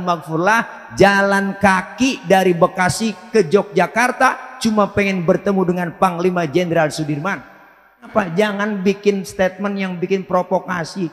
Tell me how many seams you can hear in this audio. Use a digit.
1